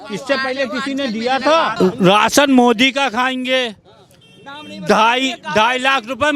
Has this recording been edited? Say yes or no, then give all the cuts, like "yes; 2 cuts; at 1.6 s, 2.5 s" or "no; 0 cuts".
yes; 1 cut; at 1.7 s